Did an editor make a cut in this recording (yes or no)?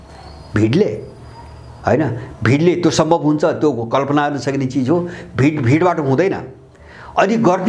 no